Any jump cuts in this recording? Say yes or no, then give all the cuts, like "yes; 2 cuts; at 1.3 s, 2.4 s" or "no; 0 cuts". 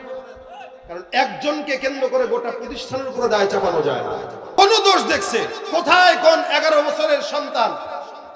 yes; 1 cut; at 4.6 s